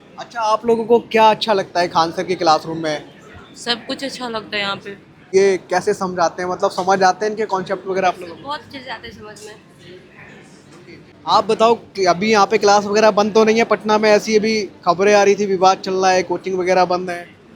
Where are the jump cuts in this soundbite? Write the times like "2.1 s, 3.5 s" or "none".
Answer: 5.3 s, 11.1 s